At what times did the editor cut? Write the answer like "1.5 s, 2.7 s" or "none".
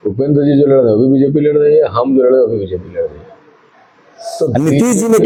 none